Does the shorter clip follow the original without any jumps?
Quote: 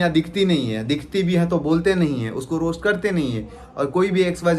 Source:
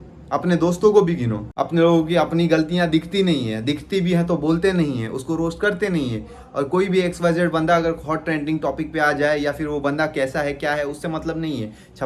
yes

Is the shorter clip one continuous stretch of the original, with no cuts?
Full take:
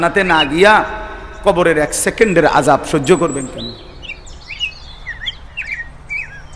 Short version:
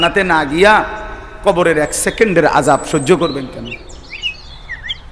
no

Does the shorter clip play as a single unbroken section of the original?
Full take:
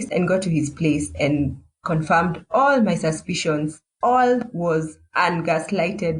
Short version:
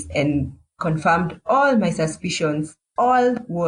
yes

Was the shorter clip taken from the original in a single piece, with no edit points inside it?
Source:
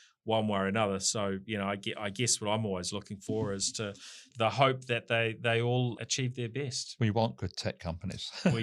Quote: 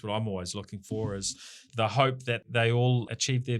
no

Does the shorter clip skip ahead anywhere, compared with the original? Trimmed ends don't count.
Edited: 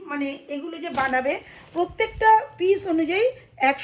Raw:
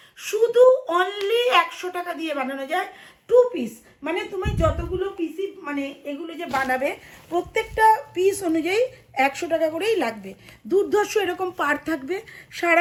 no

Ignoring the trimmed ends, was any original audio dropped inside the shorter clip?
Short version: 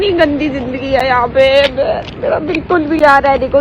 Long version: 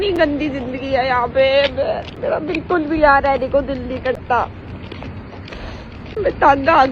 no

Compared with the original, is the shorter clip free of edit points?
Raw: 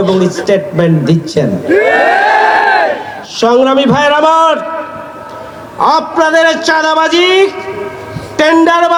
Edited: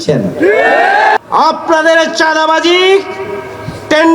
no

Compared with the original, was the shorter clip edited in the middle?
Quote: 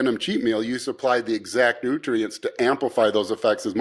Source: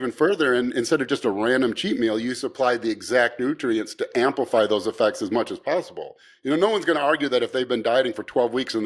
no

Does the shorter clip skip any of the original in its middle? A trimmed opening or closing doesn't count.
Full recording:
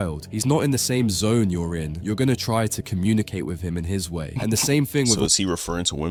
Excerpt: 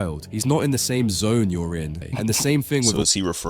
yes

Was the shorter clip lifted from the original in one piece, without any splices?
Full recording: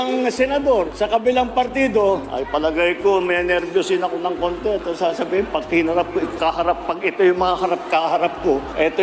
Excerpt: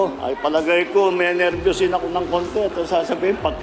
yes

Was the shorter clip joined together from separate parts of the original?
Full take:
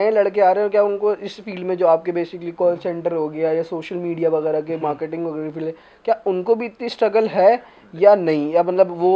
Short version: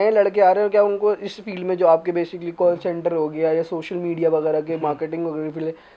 no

